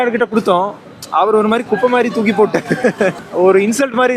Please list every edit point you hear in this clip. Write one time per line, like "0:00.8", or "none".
0:03.2